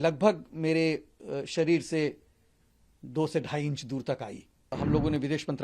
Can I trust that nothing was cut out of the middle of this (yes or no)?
no